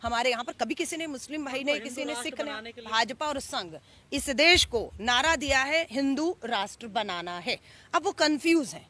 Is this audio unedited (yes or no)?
no